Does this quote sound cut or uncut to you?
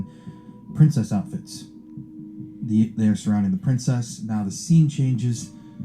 uncut